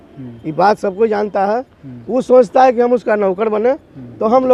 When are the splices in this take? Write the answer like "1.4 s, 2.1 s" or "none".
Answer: none